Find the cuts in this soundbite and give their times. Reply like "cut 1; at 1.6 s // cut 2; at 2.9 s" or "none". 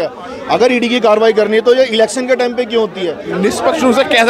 cut 1; at 3.2 s